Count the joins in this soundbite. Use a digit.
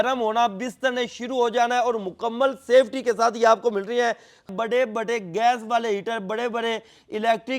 1